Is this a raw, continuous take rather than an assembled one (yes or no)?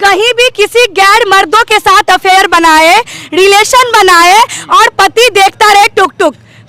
yes